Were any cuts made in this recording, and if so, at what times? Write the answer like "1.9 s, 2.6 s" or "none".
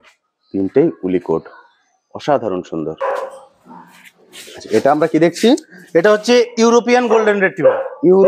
none

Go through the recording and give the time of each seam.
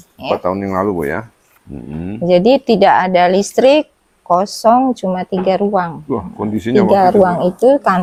none

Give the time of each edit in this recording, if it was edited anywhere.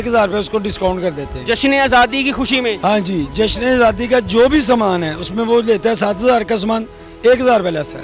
none

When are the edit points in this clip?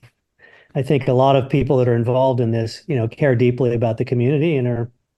none

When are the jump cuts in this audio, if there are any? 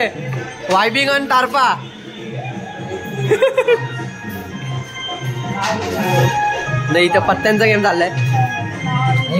none

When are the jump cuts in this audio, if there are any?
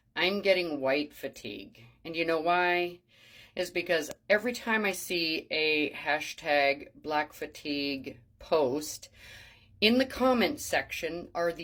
none

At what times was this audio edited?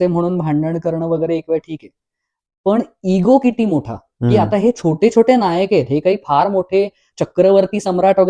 7.1 s

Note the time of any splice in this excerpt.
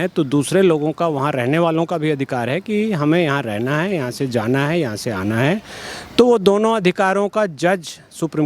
none

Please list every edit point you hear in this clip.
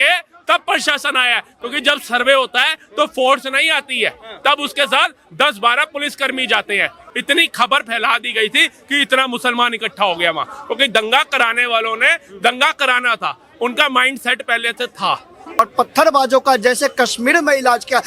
7.0 s, 15.6 s

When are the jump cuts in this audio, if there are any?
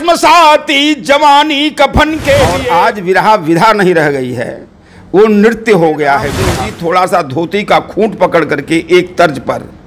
2.6 s, 6.4 s

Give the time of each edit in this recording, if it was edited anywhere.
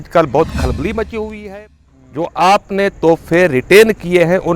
1.5 s

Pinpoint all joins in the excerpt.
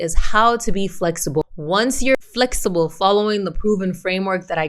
1.5 s

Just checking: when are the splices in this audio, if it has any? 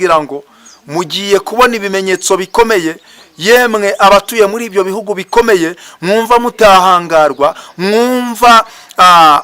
none

